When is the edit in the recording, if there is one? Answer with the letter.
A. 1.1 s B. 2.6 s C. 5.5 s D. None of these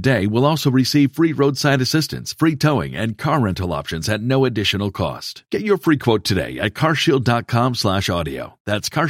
D